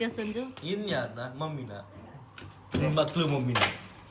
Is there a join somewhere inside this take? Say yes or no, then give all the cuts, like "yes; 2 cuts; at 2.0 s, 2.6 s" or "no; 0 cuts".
no; 0 cuts